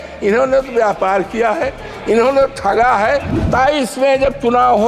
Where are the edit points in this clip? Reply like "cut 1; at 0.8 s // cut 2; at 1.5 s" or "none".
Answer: cut 1; at 3.4 s